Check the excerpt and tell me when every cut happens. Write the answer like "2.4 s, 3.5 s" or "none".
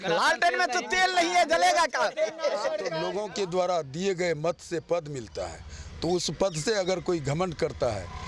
3.0 s